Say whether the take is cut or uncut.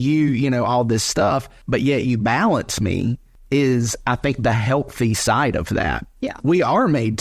cut